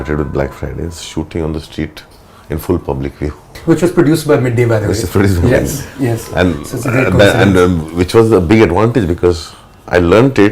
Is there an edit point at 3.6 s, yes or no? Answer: yes